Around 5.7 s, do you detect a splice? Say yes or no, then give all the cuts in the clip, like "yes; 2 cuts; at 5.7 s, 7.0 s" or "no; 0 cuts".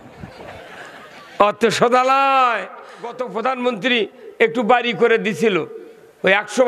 no; 1 cut; at 3.2 s